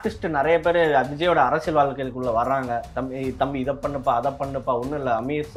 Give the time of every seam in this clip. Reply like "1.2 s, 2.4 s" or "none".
none

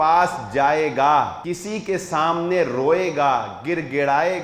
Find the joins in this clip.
1.4 s

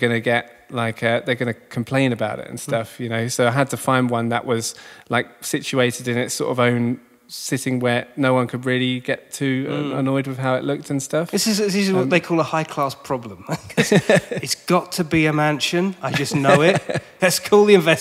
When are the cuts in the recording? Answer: 17.1 s

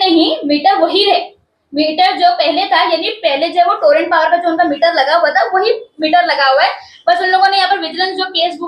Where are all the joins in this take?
none

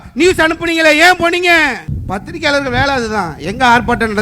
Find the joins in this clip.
1.9 s

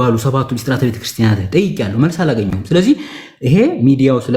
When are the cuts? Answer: none

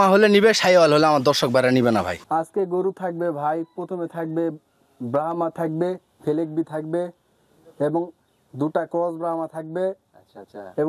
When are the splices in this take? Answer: 2.2 s

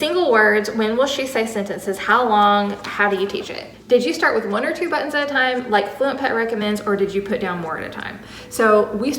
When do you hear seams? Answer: 3.6 s

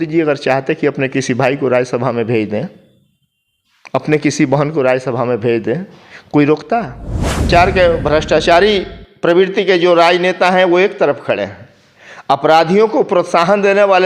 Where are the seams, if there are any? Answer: 7.5 s

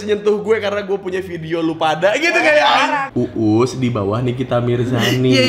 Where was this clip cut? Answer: 3.1 s

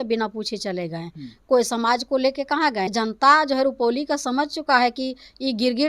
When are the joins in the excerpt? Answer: 2.9 s

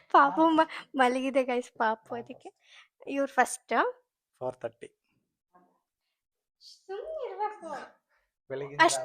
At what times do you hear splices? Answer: none

